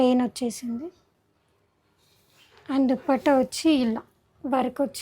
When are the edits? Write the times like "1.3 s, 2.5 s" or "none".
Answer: 1.1 s